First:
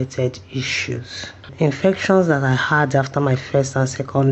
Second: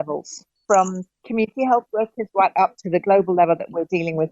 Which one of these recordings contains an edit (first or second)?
first